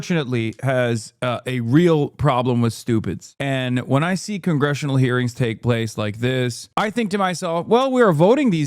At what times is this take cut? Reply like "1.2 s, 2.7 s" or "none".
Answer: 3.3 s, 6.6 s